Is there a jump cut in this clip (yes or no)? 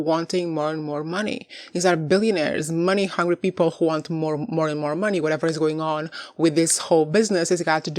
no